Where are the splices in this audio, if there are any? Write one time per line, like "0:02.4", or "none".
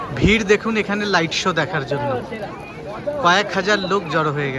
none